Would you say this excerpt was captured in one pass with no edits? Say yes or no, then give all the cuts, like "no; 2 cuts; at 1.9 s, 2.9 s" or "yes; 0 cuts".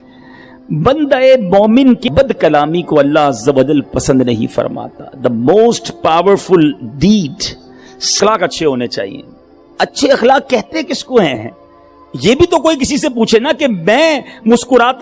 no; 2 cuts; at 2.0 s, 8.1 s